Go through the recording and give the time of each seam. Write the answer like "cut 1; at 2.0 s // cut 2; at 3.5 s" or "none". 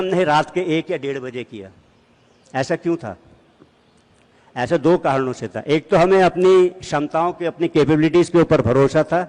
none